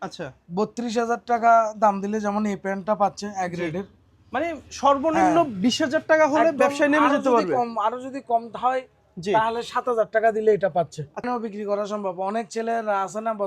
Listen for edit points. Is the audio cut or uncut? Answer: cut